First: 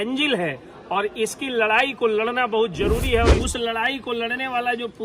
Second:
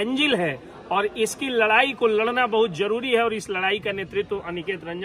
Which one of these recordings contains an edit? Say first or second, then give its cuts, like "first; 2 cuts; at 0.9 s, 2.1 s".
first; 1 cut; at 3.4 s